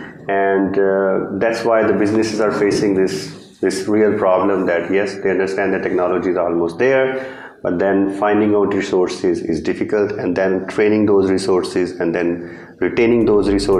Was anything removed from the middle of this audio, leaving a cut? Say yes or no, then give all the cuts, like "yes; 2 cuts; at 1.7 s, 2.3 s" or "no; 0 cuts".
no; 0 cuts